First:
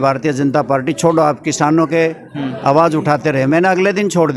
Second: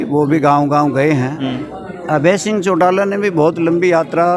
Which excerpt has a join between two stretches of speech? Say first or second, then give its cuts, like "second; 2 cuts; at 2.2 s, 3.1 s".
second; 1 cut; at 1.4 s